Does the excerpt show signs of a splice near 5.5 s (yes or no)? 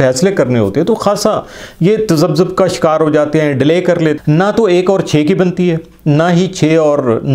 no